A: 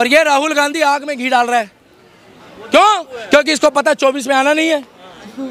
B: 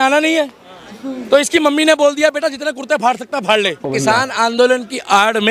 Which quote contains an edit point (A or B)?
B